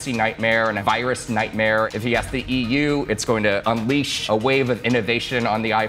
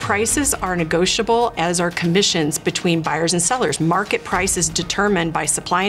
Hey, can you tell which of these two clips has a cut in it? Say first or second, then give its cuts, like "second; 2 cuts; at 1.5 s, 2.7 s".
first; 3 cuts; at 0.8 s, 1.9 s, 4.2 s